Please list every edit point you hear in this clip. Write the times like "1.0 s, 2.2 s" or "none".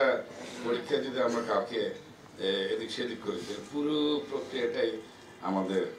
none

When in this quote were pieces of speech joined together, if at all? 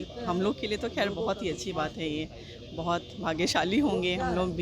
none

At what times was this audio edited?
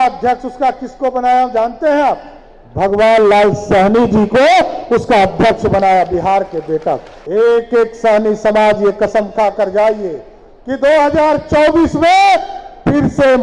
7.1 s

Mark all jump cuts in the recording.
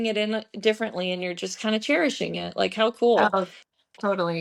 none

